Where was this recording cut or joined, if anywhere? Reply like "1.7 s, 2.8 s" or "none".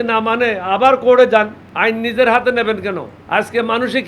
1.6 s, 3.1 s